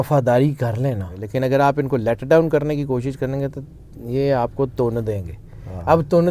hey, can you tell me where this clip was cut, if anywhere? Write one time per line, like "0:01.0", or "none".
0:01.1